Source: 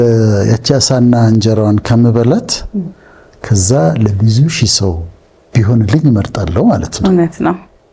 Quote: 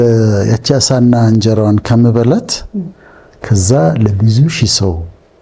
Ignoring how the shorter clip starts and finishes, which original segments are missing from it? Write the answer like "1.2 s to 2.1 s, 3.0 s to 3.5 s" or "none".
none